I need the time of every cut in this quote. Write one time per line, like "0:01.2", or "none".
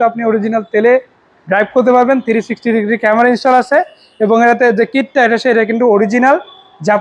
none